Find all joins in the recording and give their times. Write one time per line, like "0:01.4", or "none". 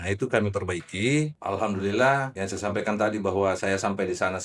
0:01.4
0:02.3